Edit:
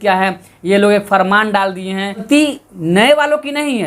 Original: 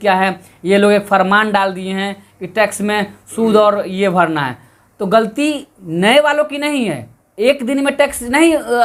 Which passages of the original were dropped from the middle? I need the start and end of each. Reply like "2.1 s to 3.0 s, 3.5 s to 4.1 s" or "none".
2.2 s to 5.3 s